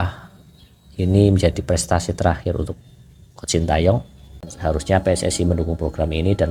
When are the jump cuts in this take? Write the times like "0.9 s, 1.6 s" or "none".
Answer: 4.5 s